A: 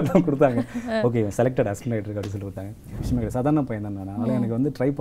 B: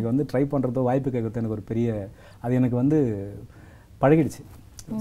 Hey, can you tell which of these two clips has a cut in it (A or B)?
A